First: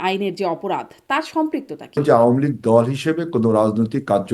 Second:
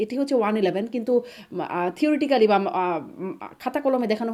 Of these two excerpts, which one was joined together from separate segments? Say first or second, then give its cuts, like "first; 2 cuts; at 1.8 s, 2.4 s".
first; 1 cut; at 2.0 s